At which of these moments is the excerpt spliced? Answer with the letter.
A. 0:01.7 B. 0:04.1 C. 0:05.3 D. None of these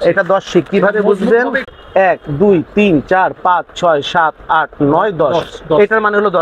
A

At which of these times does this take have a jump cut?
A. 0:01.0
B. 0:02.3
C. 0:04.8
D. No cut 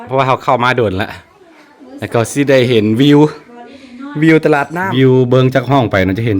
C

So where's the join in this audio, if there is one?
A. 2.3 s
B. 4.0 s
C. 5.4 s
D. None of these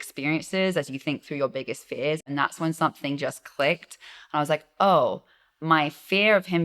A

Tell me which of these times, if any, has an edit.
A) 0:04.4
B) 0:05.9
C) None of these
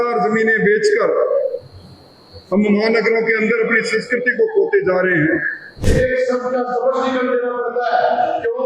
B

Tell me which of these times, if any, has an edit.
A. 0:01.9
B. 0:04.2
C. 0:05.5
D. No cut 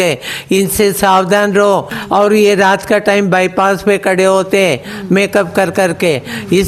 A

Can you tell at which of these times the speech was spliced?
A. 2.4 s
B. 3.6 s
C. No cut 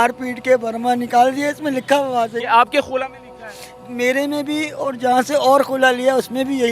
A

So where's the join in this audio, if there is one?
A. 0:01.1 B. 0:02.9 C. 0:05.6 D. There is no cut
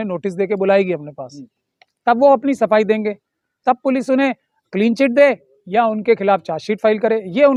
D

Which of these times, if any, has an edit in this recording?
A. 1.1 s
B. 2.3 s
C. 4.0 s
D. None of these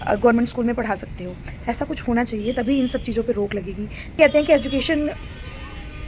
C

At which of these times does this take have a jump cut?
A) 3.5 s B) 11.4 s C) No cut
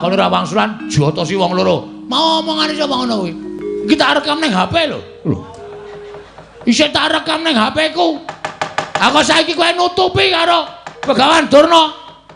A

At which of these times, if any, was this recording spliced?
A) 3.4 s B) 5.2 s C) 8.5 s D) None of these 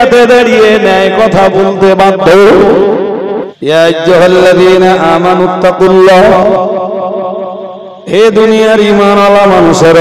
A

